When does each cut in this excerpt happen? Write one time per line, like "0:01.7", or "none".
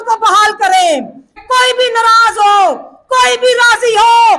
0:01.4